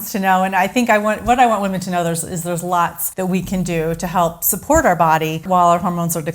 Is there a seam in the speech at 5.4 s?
yes; 2 cuts; at 3.0 s, 5.4 s

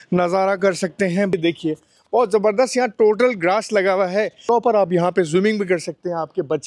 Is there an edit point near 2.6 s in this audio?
no; 2 cuts; at 1.3 s, 4.4 s

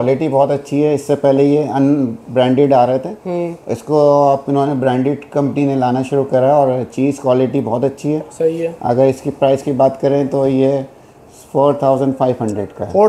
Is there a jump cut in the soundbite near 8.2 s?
no; 0 cuts

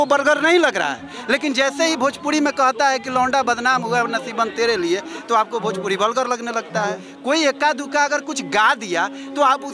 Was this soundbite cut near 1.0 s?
no; 1 cut; at 7.1 s

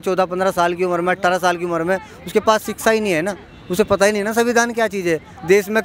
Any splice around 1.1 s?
no; 0 cuts

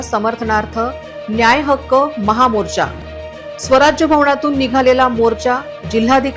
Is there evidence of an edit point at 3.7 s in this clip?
no; 0 cuts

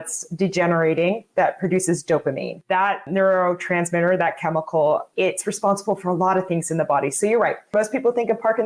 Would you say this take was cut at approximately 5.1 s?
yes; 3 cuts; at 3.0 s, 5.1 s, 7.7 s

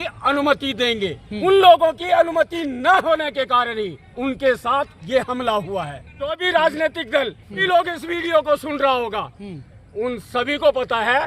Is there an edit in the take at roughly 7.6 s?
yes; 4 cuts; at 1.3 s, 4.1 s, 6.4 s, 7.6 s

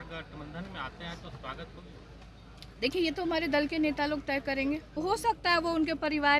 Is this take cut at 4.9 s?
yes; 1 cut; at 4.9 s

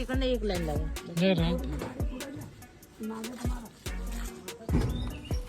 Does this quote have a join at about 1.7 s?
no; 0 cuts

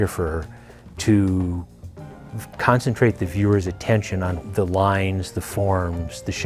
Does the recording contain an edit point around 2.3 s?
no; 1 cut; at 4.4 s

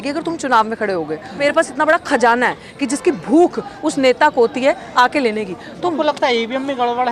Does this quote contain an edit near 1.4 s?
yes; 2 cuts; at 1.4 s, 6.0 s

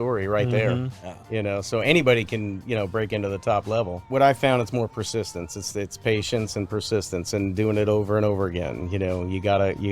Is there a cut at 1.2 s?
no; 1 cut; at 4.1 s

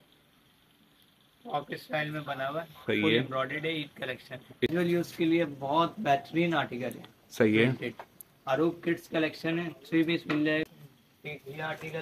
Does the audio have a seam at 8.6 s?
no; 2 cuts; at 4.7 s, 10.6 s

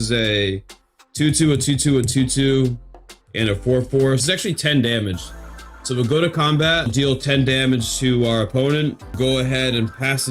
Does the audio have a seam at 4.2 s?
yes; 3 cuts; at 4.2 s, 6.9 s, 9.1 s

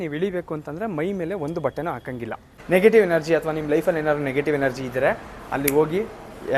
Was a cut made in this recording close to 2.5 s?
yes; 1 cut; at 2.5 s

